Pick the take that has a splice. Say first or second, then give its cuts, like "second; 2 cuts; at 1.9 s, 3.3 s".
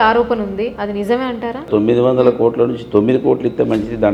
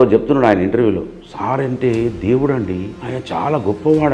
first; 2 cuts; at 0.8 s, 1.7 s